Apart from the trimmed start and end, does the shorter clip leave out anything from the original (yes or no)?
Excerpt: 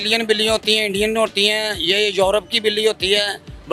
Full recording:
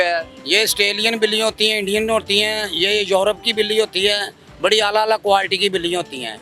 no